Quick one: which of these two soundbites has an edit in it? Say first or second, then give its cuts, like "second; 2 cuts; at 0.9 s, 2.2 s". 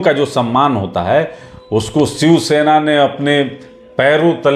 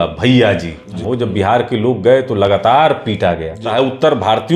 second; 2 cuts; at 1.0 s, 3.7 s